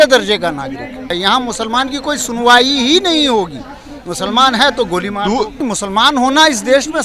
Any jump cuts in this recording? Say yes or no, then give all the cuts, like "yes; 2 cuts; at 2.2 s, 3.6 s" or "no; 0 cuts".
yes; 2 cuts; at 1.1 s, 5.6 s